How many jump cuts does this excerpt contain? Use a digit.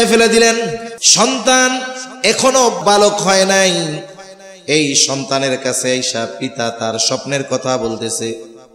2